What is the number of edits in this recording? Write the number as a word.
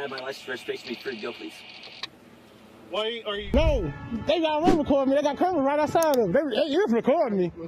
one